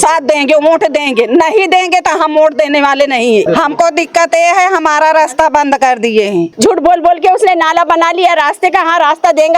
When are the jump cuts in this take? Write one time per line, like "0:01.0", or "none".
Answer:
0:03.5
0:06.5